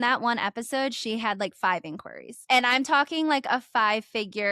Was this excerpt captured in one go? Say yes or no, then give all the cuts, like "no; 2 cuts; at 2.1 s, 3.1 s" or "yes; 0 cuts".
no; 1 cut; at 2.5 s